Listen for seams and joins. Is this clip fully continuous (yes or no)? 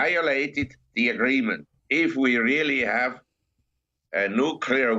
no